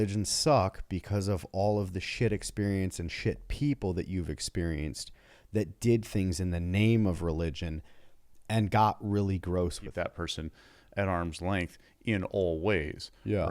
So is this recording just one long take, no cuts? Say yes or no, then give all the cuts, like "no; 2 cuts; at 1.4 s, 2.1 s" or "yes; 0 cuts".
no; 1 cut; at 9.9 s